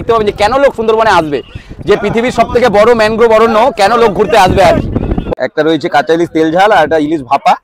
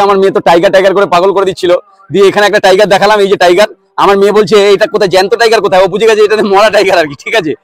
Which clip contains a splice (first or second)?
first